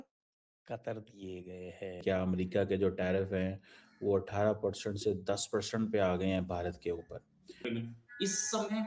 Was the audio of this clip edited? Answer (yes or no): yes